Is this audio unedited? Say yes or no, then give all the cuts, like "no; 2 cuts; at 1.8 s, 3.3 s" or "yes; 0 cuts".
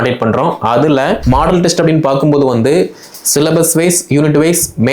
no; 1 cut; at 1.2 s